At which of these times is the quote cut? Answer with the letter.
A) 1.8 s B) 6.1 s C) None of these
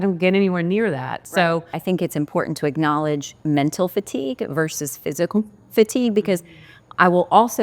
A